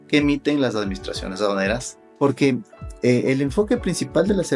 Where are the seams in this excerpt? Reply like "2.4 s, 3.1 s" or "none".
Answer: 2.0 s